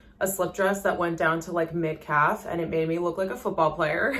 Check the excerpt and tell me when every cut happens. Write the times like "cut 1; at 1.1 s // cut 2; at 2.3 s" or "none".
none